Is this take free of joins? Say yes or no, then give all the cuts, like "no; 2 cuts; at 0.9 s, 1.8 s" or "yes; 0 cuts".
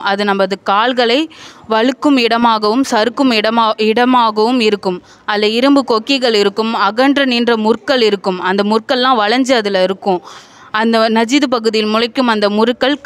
yes; 0 cuts